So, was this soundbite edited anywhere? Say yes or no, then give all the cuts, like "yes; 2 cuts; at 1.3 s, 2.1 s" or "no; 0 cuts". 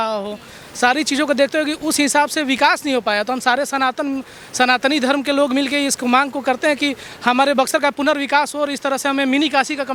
no; 0 cuts